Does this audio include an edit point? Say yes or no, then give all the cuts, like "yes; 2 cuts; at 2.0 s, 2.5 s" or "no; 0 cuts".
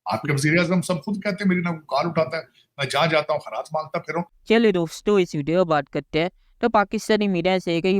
no; 0 cuts